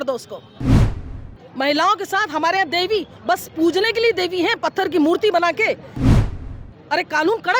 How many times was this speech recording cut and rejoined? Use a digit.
2